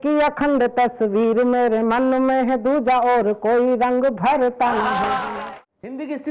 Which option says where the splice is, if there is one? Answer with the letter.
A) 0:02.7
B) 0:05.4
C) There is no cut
B